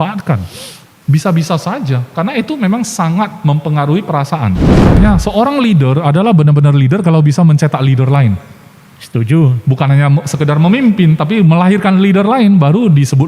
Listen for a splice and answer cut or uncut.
cut